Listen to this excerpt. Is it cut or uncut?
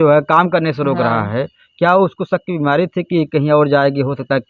uncut